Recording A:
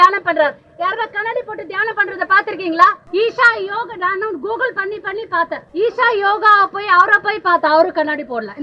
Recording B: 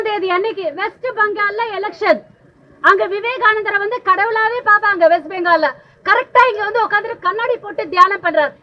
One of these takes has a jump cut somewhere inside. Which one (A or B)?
A